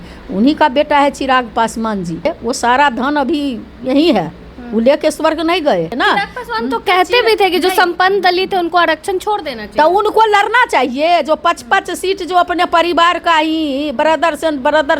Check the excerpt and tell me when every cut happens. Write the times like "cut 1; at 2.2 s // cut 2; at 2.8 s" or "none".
cut 1; at 2.3 s // cut 2; at 5.9 s